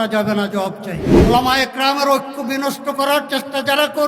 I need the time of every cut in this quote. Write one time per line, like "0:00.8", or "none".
0:01.1